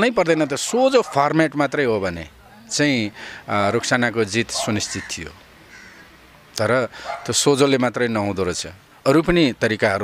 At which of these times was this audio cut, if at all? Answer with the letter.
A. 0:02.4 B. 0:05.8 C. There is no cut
C